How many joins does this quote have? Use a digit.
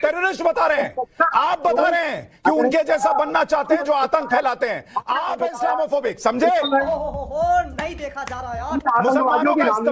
0